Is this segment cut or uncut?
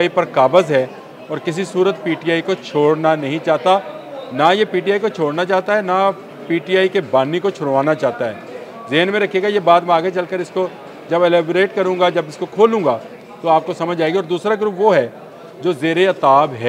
uncut